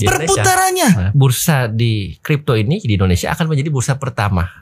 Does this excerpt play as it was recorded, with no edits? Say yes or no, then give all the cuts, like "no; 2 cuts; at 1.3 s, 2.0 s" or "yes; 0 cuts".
no; 1 cut; at 1.1 s